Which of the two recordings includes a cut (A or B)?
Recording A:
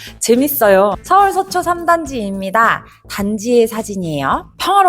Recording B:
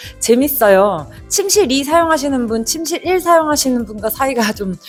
A